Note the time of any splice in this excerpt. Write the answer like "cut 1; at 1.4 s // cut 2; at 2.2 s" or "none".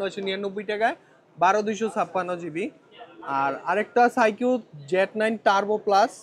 none